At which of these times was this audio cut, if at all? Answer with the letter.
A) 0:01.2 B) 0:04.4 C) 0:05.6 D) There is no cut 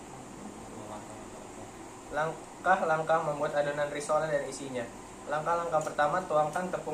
D